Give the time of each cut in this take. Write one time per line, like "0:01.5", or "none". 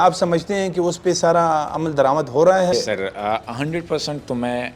0:02.7